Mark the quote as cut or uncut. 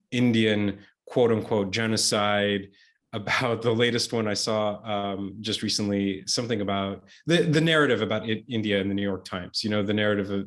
uncut